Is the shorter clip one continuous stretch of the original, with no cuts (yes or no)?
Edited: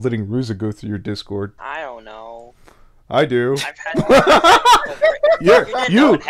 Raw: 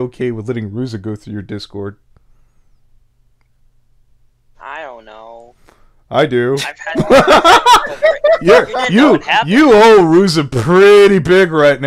no